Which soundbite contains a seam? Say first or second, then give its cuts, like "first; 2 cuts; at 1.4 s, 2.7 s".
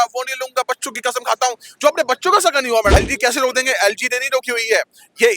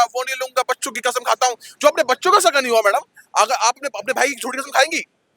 first; 1 cut; at 2.9 s